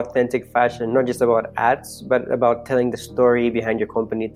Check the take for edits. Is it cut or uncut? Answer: uncut